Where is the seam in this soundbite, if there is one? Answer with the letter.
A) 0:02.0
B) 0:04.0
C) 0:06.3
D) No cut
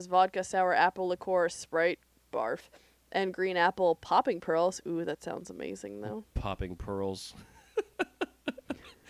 D